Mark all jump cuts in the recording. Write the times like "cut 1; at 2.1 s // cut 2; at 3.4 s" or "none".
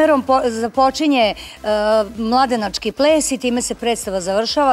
none